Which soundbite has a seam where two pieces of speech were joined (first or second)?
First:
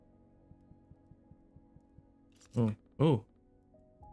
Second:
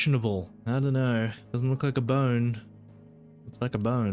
second